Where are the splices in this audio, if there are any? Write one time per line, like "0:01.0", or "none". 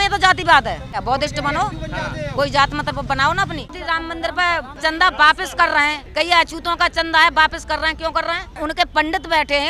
0:00.9
0:03.6
0:04.8
0:06.0
0:08.5